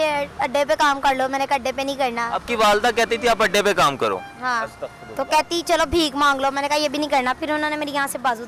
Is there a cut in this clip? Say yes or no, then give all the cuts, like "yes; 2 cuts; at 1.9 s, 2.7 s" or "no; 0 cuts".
no; 0 cuts